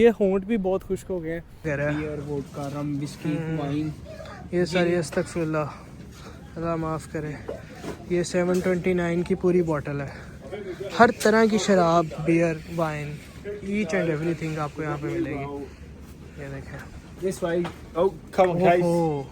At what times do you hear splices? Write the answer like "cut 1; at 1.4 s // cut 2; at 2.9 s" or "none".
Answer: cut 1; at 1.7 s